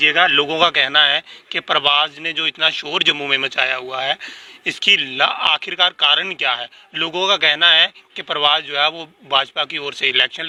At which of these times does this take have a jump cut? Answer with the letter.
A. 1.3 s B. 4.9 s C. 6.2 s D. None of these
D